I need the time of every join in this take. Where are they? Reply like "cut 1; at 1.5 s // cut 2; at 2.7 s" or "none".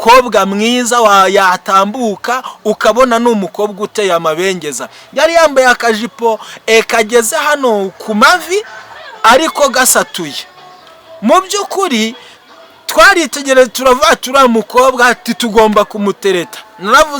none